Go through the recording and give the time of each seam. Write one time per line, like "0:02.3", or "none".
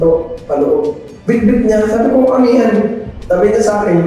0:01.1
0:03.1